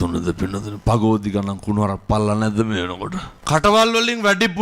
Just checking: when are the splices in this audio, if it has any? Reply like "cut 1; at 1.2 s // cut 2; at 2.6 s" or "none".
cut 1; at 3.3 s

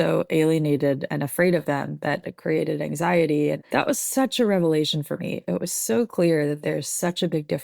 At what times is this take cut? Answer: cut 1; at 2.3 s // cut 2; at 3.7 s

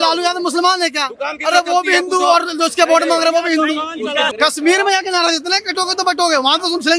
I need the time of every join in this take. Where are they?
cut 1; at 4.3 s

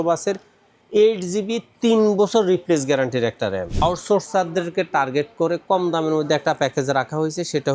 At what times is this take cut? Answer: cut 1; at 3.8 s

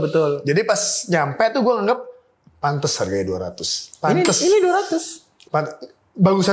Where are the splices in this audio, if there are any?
none

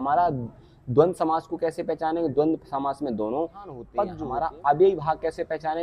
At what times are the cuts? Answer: cut 1; at 4.2 s

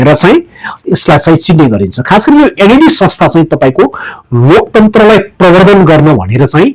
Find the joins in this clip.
none

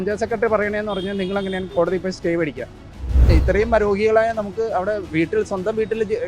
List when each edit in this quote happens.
cut 1; at 3.2 s

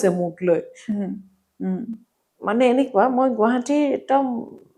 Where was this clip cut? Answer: none

